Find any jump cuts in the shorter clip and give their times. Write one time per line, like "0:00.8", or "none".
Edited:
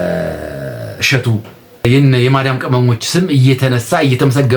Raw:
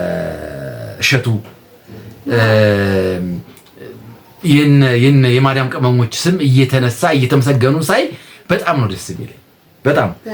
0:01.8